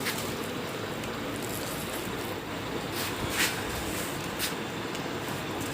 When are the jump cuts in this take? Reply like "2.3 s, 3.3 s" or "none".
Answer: 2.4 s